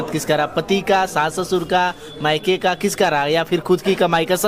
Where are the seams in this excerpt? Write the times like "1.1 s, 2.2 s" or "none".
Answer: none